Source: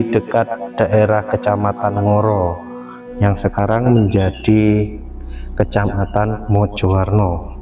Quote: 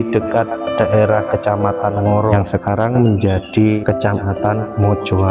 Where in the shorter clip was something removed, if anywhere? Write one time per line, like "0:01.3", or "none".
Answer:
0:02.3
0:03.8